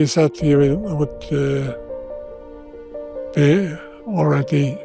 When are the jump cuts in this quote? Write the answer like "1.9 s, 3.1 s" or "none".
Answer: none

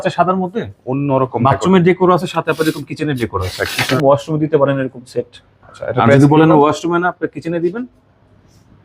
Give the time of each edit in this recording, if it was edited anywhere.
4.0 s

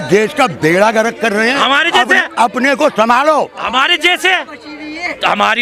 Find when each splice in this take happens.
none

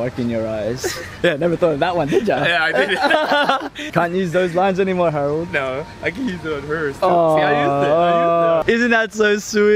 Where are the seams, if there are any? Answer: 1.1 s, 3.8 s, 8.6 s

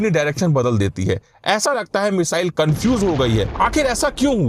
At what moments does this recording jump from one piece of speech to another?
3.5 s

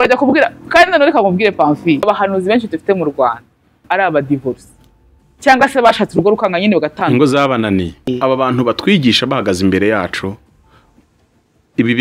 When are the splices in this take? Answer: 2.0 s, 3.8 s, 8.1 s

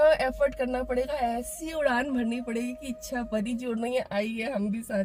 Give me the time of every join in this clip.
none

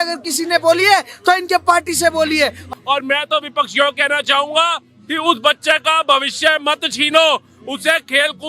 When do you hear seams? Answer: 2.6 s

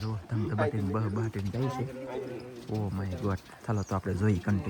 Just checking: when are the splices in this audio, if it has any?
none

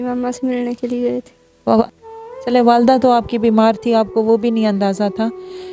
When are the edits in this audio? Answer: 1.8 s

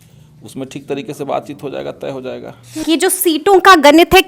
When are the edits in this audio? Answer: 2.8 s

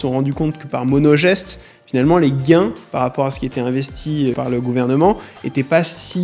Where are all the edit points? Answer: 4.4 s

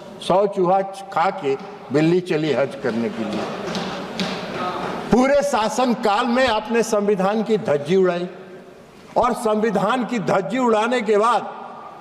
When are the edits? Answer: none

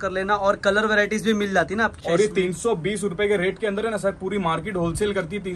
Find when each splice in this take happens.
2.0 s

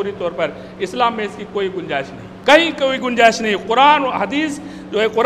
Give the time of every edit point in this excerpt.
2.2 s

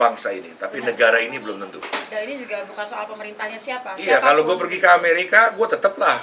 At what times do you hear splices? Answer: 1.8 s

